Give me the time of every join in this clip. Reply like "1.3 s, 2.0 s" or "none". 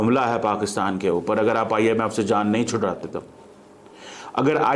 none